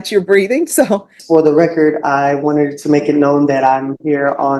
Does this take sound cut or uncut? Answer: cut